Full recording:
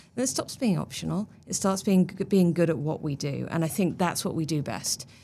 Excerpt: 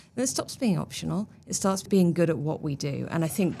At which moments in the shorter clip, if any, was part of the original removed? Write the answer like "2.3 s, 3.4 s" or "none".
1.8 s